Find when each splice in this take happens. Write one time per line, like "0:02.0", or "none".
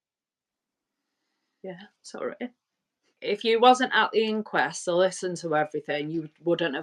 0:03.2